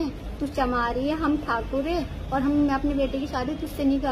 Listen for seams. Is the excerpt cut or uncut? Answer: uncut